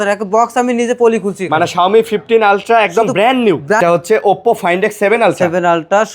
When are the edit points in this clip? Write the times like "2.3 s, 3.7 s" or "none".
3.8 s